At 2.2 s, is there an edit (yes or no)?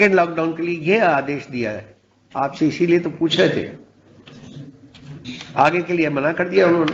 no